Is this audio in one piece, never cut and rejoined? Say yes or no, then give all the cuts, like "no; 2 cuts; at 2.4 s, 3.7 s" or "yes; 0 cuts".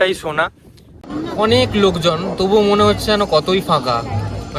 no; 1 cut; at 1.0 s